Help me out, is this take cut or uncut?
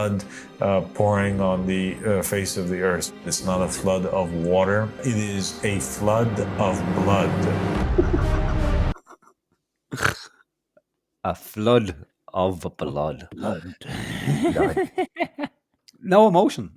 cut